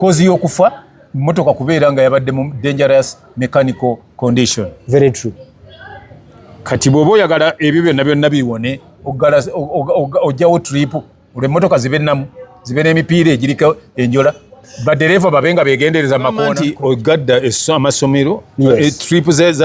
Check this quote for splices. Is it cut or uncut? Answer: cut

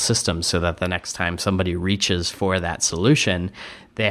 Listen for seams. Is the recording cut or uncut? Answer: uncut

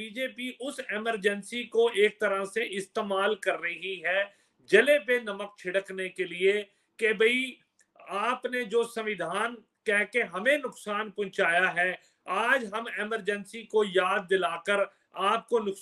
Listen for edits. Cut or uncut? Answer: uncut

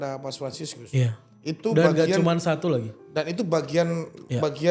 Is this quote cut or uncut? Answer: uncut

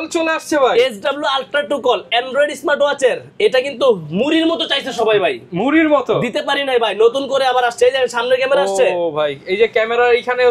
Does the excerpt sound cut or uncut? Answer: uncut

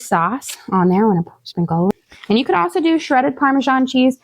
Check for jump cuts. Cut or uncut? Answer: cut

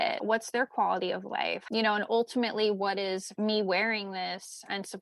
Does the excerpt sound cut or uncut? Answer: cut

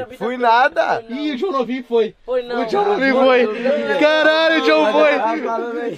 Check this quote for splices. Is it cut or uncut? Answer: uncut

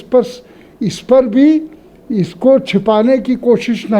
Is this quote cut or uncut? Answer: uncut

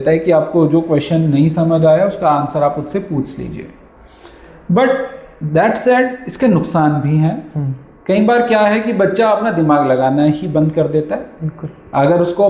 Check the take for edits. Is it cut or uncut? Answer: uncut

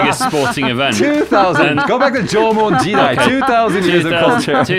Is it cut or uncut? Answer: uncut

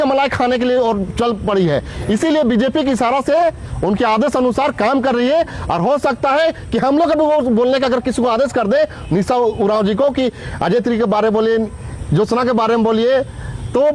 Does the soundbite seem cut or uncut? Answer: uncut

